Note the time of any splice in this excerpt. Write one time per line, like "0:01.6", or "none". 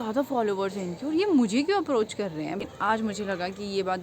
0:02.6